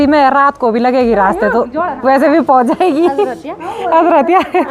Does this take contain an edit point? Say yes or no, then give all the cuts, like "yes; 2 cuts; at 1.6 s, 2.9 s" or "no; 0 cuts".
no; 0 cuts